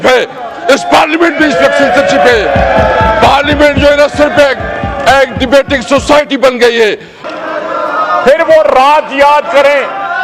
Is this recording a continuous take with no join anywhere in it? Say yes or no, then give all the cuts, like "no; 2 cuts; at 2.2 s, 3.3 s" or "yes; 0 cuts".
no; 1 cut; at 7.2 s